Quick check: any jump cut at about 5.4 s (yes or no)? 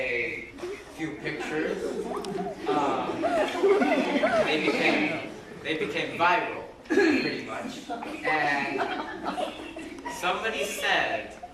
no